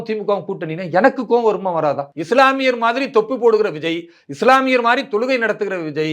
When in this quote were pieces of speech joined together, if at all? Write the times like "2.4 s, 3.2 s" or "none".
2.1 s